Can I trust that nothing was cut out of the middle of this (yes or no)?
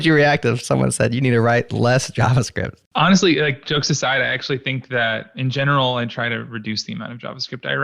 no